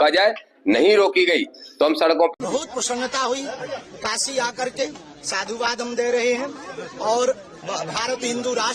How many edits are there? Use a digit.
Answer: 1